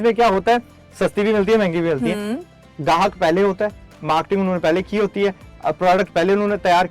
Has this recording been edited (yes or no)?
no